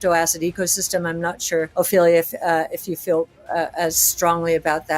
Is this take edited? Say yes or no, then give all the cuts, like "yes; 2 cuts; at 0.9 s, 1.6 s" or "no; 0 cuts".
yes; 1 cut; at 1.7 s